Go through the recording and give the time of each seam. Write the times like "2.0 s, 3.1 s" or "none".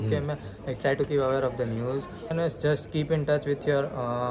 2.3 s